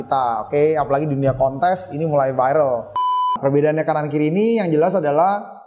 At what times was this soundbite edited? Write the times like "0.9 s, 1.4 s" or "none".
3.3 s